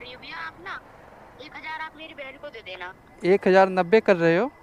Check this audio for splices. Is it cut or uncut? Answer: uncut